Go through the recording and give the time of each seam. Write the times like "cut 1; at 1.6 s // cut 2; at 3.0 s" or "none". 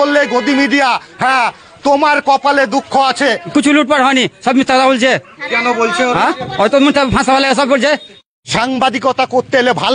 cut 1; at 3.4 s // cut 2; at 8.2 s